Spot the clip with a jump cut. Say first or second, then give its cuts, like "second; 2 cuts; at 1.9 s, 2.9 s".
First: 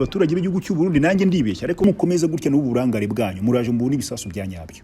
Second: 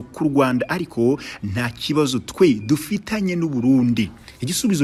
first; 1 cut; at 1.8 s